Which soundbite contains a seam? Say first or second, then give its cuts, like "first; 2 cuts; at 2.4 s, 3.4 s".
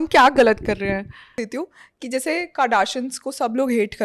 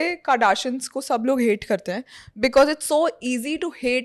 first; 1 cut; at 1.3 s